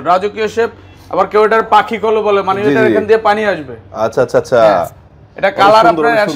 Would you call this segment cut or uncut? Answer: uncut